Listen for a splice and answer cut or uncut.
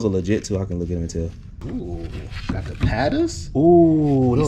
cut